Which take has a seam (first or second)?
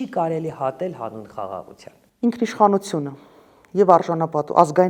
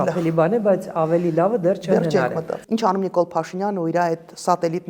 second